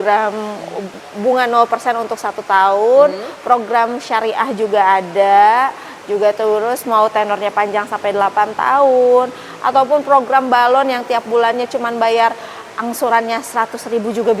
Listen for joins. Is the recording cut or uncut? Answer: cut